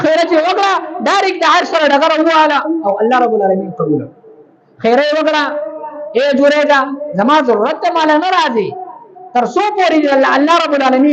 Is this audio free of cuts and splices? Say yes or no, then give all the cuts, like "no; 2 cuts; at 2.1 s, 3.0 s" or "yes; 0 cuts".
yes; 0 cuts